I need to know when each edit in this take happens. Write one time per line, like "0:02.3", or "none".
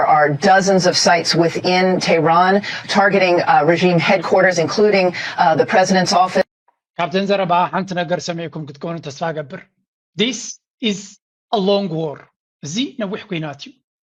none

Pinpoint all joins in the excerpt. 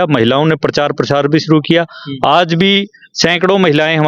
none

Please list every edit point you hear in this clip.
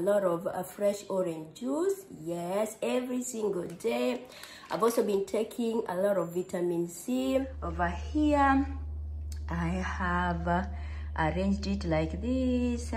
0:07.6

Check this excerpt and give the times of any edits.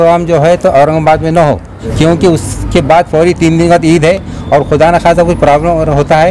0:01.8

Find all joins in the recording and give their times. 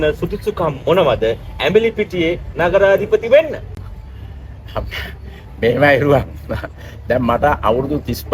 none

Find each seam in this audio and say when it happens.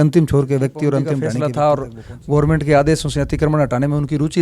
0:01.3

